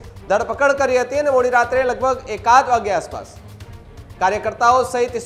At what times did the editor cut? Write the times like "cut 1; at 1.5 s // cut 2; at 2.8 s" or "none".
none

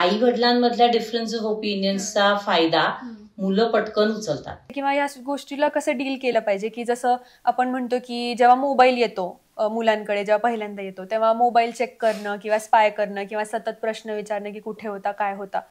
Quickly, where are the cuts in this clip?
cut 1; at 4.7 s

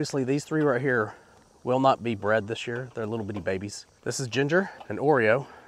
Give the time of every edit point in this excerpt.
cut 1; at 3.9 s // cut 2; at 4.8 s

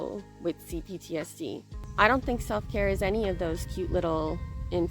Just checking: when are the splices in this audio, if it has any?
cut 1; at 1.8 s

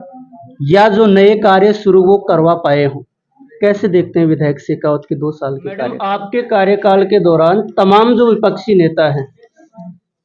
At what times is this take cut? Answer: cut 1; at 6.1 s

